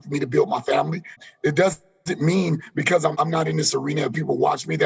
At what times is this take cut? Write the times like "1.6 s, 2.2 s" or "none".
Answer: 1.2 s, 3.1 s